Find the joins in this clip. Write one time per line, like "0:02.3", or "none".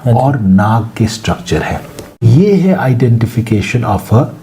0:02.3